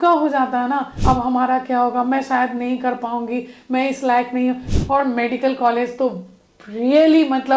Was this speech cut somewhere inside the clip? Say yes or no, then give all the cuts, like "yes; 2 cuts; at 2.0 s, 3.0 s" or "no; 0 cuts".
yes; 2 cuts; at 0.9 s, 4.7 s